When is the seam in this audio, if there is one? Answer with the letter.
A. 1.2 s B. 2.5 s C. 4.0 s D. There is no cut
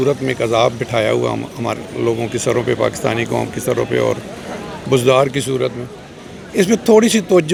D